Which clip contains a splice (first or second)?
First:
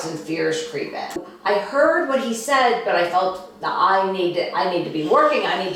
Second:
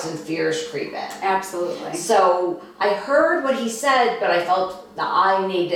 first